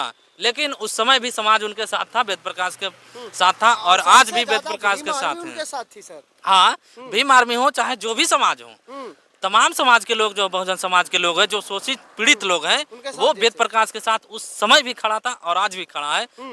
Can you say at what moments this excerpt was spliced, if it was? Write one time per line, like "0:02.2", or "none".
none